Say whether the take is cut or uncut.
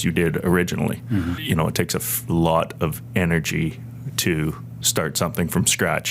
cut